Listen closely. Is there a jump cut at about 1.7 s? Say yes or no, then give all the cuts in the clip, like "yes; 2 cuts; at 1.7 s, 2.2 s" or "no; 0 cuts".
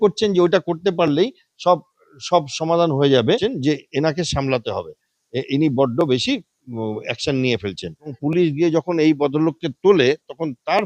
no; 2 cuts; at 3.4 s, 8.2 s